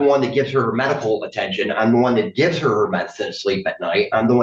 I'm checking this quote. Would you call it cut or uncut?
uncut